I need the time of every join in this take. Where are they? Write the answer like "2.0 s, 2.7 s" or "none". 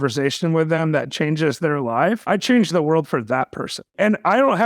2.2 s, 3.8 s